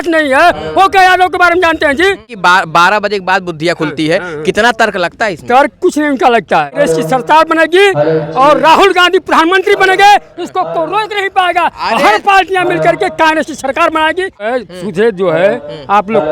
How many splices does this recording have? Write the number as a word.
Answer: three